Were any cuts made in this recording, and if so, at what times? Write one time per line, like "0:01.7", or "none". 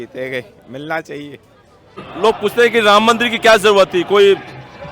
0:02.1